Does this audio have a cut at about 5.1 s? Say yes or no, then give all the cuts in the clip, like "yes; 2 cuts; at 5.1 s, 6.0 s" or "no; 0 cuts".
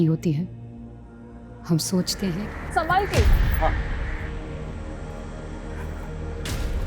no; 1 cut; at 2.3 s